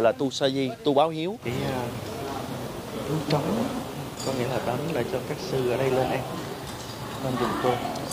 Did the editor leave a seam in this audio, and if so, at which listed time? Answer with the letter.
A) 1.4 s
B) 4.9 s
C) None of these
A